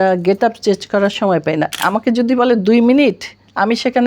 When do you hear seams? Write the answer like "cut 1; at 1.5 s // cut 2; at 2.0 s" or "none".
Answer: cut 1; at 1.7 s